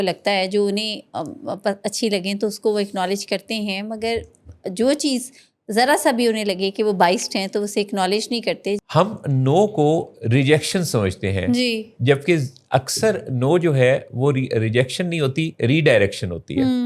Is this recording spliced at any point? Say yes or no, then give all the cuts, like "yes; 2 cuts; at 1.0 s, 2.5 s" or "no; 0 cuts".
yes; 1 cut; at 8.8 s